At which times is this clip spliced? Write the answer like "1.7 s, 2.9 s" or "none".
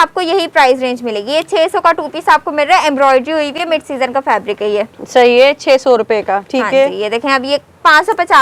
none